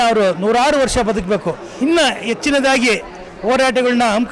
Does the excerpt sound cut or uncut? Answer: cut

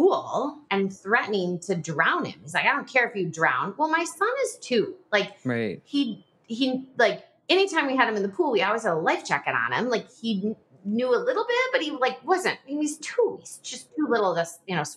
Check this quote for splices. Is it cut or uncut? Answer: uncut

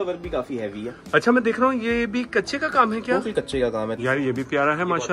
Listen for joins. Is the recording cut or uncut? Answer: cut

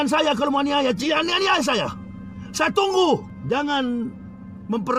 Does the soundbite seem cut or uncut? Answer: cut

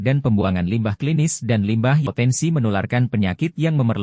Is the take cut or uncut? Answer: cut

